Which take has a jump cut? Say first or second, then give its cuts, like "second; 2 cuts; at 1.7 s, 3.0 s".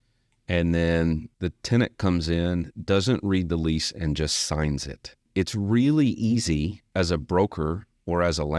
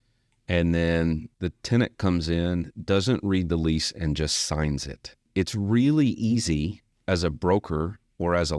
first; 1 cut; at 6.8 s